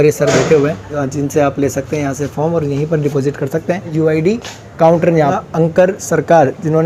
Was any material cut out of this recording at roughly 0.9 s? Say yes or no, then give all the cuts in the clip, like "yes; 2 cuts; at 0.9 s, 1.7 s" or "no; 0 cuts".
yes; 3 cuts; at 0.9 s, 3.9 s, 5.2 s